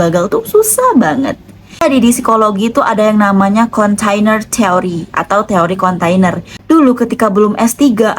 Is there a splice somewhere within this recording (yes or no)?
yes